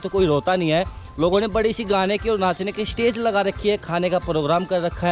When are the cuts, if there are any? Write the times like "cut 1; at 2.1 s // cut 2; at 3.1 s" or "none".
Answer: none